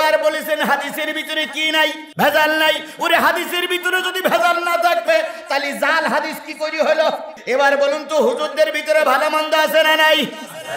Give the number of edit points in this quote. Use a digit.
2